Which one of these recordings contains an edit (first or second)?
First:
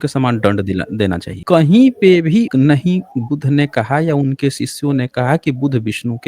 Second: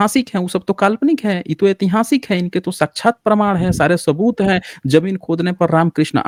first